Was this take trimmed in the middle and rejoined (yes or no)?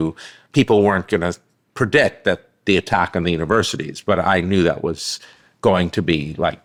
no